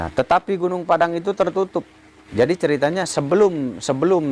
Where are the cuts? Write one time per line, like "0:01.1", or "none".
none